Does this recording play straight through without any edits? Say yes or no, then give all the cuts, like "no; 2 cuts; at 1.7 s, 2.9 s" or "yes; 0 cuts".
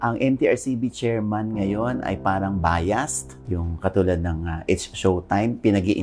no; 1 cut; at 3.3 s